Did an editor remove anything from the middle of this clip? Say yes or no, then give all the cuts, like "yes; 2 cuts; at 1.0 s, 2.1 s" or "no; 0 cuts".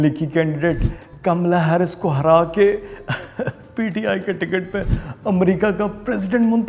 no; 0 cuts